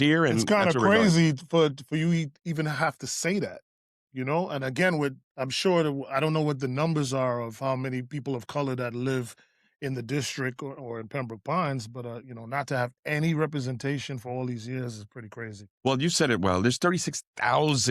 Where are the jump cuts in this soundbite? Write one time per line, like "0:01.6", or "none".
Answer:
0:04.1
0:15.6